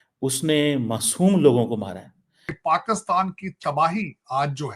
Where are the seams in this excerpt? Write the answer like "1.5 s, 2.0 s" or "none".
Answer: 2.5 s